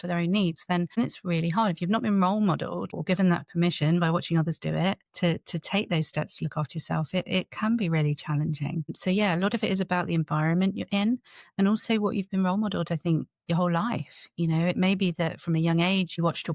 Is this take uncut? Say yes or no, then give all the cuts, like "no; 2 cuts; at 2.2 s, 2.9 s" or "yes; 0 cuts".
yes; 0 cuts